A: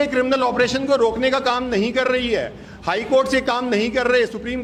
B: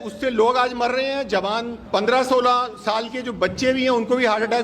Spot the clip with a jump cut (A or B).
B